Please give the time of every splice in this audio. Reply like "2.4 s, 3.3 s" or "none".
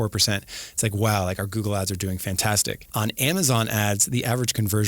2.9 s